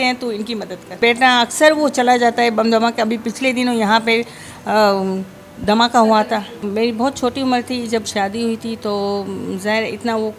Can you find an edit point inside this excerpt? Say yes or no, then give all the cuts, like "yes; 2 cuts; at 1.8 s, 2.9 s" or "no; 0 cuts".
yes; 2 cuts; at 1.0 s, 6.7 s